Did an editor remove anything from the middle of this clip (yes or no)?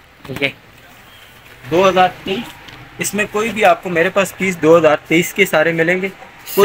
yes